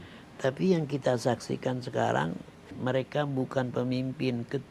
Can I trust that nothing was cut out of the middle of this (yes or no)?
no